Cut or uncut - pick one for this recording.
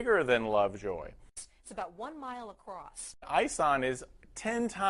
cut